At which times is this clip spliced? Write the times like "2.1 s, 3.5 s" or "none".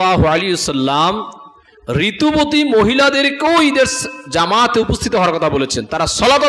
none